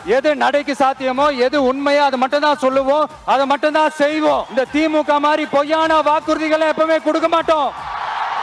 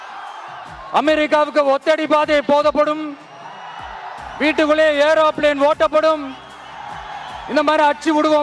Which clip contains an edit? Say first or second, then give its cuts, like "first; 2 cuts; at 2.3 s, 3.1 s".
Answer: first; 1 cut; at 4.5 s